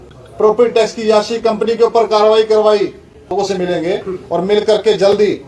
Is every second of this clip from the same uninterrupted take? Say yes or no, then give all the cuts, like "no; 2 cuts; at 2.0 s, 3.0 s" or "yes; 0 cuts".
no; 1 cut; at 3.3 s